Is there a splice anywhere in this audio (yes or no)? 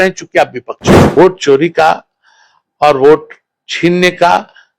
yes